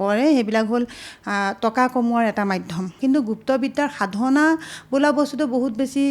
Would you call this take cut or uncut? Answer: uncut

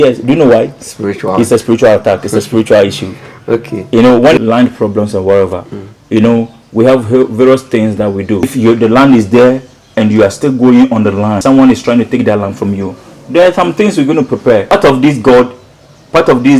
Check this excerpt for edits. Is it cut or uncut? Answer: cut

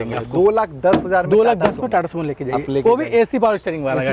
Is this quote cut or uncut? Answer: uncut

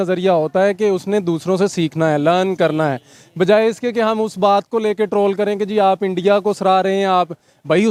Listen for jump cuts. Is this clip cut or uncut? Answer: uncut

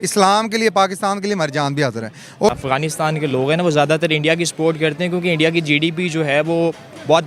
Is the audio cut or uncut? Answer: cut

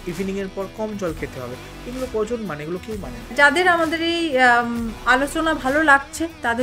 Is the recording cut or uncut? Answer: cut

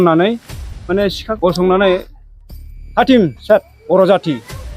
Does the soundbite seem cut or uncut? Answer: cut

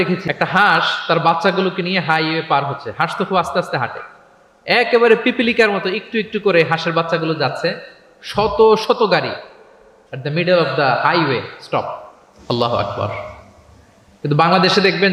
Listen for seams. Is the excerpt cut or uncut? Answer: uncut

